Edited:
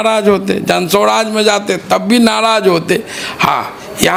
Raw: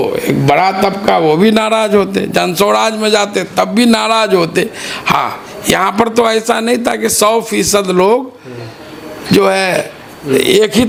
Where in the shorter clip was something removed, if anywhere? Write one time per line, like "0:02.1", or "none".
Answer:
none